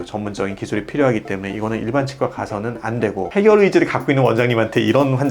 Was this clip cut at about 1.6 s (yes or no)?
no